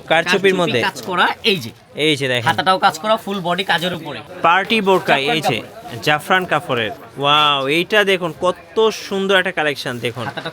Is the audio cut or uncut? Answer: cut